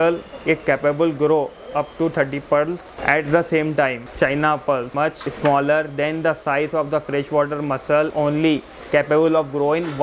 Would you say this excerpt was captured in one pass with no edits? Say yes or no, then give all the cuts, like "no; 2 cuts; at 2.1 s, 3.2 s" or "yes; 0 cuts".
no; 4 cuts; at 2.9 s, 4.0 s, 5.0 s, 8.1 s